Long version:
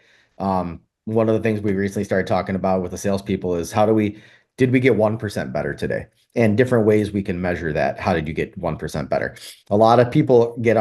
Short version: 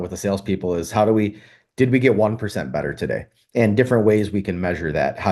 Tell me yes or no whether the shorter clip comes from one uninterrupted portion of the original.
yes